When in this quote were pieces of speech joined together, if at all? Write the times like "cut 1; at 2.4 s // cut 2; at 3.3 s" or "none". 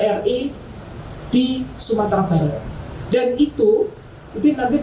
none